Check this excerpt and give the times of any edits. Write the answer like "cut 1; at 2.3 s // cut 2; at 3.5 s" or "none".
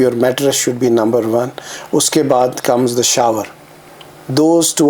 none